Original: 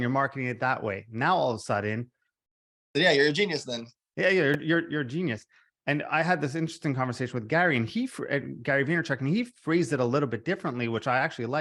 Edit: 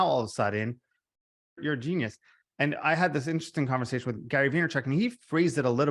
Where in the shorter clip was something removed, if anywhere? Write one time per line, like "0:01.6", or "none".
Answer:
0:01.6
0:04.1